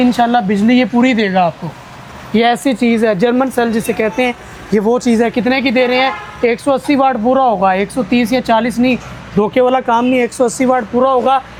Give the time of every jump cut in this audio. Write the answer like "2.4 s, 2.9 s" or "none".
none